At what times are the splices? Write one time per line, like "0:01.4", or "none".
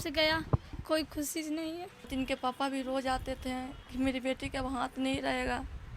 0:02.1